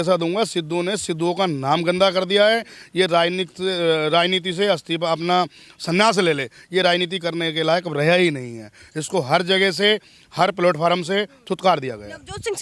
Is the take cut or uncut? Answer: uncut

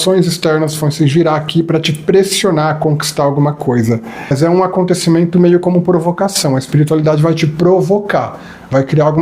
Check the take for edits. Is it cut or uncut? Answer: cut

